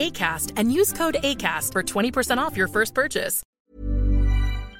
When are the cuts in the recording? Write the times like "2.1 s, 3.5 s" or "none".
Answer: 3.4 s

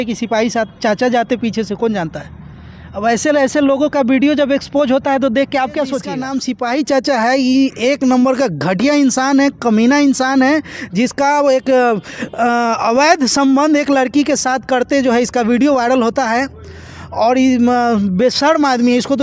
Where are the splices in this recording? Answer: 6.2 s

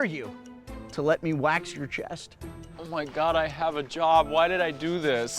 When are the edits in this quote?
2.7 s

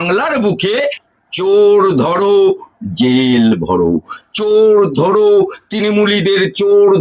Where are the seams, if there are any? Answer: 1.1 s

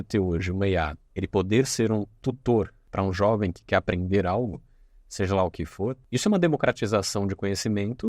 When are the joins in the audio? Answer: 1.0 s, 2.8 s, 6.0 s

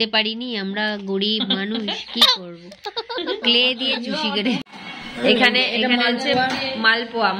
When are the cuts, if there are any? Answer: 4.6 s

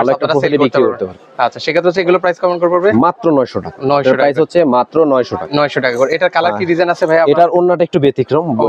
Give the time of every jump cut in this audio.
none

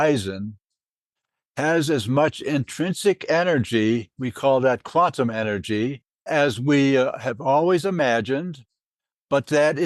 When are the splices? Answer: 6.2 s

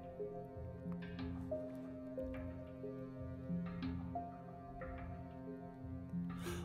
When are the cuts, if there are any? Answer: none

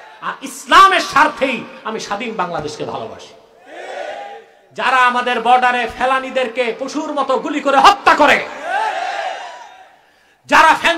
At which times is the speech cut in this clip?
4.6 s

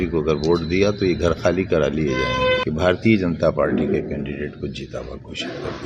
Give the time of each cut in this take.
2.6 s

